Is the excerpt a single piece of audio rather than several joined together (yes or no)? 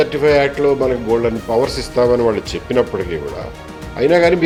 yes